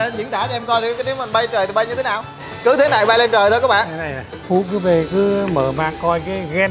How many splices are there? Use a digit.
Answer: 1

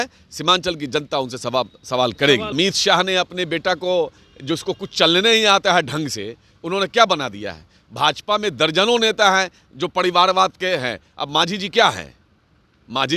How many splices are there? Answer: 1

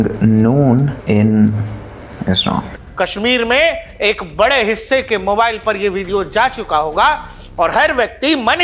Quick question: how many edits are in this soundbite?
2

